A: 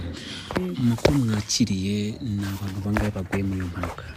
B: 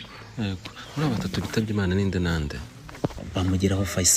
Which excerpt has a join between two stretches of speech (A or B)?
B